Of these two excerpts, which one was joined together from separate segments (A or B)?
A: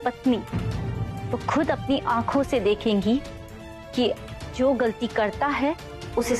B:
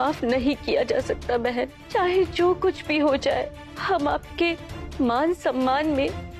B